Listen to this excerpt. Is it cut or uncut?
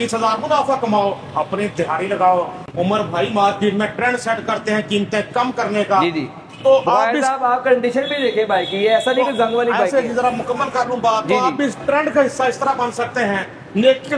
cut